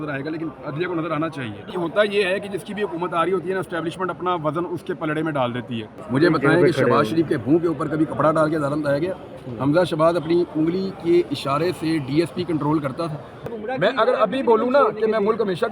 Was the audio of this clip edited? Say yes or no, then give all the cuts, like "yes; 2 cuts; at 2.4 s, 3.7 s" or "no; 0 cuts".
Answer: yes; 3 cuts; at 1.7 s, 5.9 s, 13.5 s